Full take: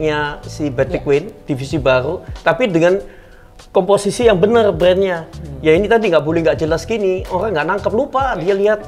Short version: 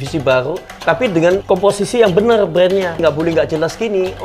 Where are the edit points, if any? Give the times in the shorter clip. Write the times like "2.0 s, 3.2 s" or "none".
1.4 s, 3.0 s